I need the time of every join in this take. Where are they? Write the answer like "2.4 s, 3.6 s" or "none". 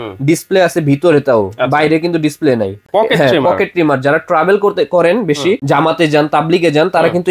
2.9 s, 5.6 s